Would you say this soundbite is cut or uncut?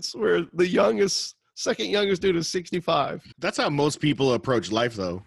cut